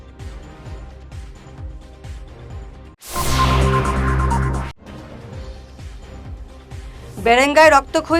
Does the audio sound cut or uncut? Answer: cut